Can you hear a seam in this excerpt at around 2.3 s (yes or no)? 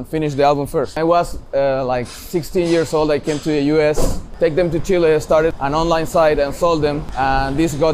no